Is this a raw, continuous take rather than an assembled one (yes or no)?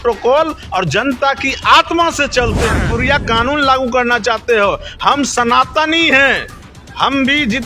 no